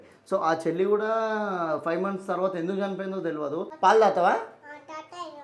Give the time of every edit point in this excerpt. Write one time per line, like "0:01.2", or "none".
0:03.7